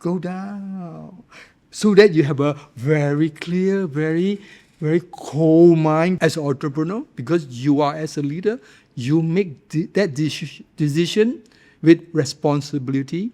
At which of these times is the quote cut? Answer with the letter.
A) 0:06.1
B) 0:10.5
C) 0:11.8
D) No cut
A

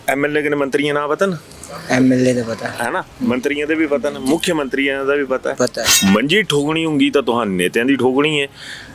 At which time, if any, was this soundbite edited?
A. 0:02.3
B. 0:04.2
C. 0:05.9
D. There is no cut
C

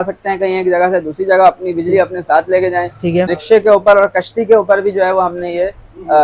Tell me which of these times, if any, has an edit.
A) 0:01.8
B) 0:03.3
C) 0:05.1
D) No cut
B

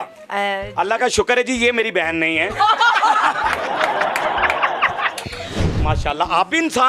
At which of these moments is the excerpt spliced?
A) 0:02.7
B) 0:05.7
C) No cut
B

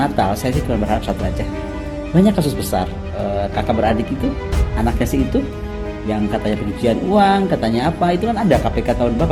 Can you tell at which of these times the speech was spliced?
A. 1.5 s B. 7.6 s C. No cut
C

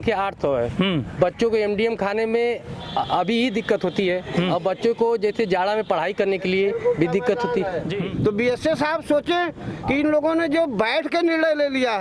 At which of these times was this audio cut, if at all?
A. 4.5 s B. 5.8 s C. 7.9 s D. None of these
C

